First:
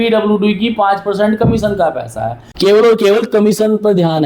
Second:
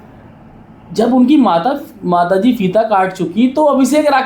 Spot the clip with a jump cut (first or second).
first